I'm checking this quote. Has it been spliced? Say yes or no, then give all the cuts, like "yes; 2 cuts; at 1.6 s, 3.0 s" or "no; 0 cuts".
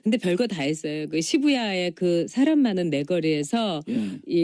yes; 1 cut; at 3.2 s